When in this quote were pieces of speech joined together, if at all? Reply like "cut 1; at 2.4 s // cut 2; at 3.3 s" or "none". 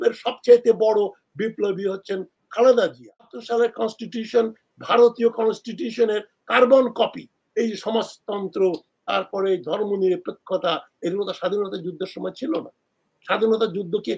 cut 1; at 3.4 s